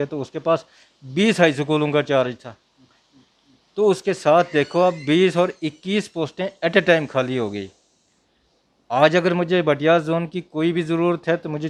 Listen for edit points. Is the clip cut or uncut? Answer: uncut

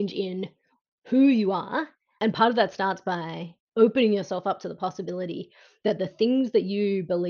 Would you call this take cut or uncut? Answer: cut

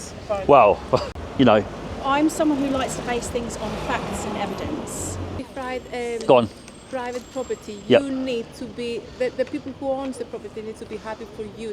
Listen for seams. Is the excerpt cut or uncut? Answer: cut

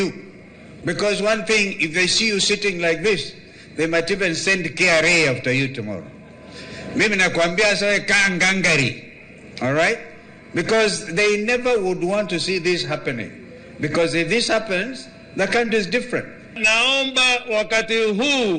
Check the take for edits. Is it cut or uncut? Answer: uncut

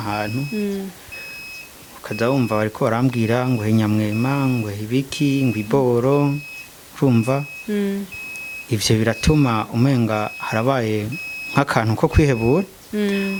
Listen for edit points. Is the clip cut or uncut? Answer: uncut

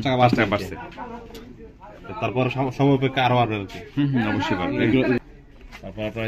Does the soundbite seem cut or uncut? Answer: cut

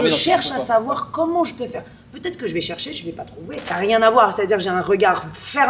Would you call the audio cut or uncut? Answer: cut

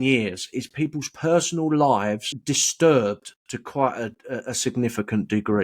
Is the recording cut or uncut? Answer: cut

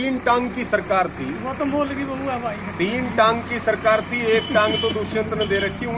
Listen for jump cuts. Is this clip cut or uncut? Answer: uncut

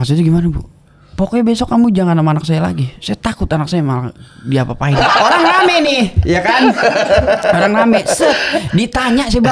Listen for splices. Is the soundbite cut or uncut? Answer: cut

